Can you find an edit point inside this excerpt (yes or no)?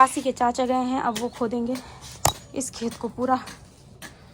no